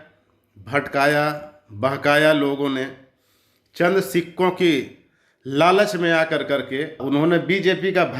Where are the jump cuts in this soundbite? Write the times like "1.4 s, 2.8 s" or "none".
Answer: 7.0 s